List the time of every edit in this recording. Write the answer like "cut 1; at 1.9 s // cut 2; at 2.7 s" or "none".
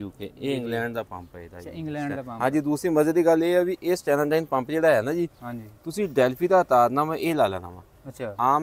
none